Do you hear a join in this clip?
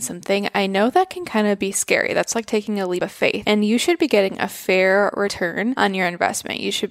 yes; 2 cuts; at 3.2 s, 5.6 s

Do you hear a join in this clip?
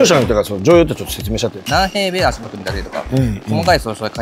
yes; 1 cut; at 1.6 s

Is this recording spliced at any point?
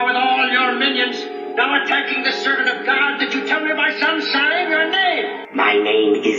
yes; 1 cut; at 5.4 s

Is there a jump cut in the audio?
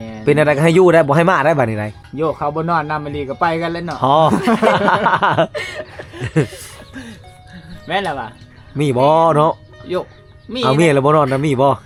no; 0 cuts

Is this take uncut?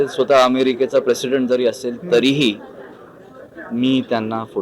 yes; 0 cuts

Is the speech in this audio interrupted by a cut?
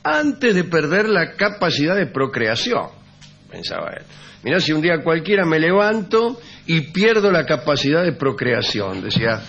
yes; 1 cut; at 2.5 s

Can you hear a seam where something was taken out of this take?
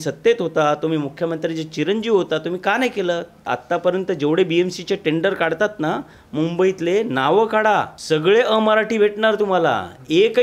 yes; 2 cuts; at 3.5 s, 7.9 s

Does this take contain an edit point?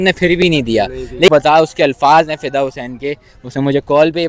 yes; 1 cut; at 1.3 s

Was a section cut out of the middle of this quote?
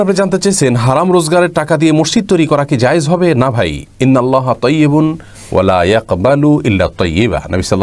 no; 0 cuts

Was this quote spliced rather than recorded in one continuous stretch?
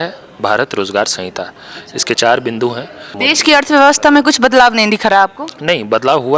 yes; 1 cut; at 3.0 s

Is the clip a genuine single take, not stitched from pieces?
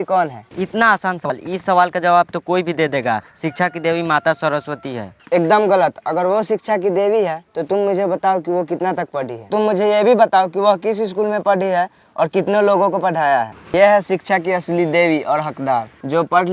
no; 2 cuts; at 1.3 s, 13.7 s

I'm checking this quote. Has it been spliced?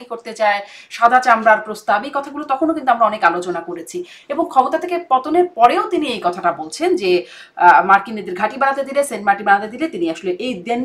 no; 0 cuts

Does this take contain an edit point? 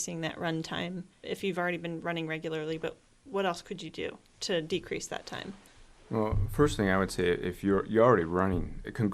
no; 0 cuts

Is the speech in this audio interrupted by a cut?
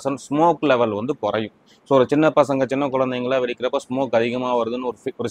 no; 0 cuts

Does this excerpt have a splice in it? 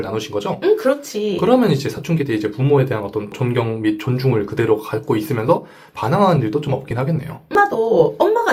no; 0 cuts

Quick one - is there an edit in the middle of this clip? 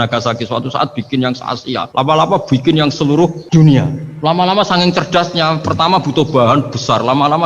yes; 3 cuts; at 1.9 s, 3.4 s, 4.0 s

